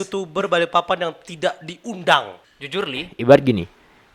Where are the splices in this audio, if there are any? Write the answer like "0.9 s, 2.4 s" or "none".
2.4 s